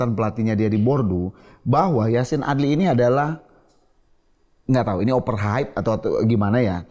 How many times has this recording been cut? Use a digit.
0